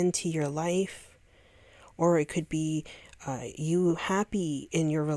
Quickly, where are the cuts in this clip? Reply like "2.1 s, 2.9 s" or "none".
none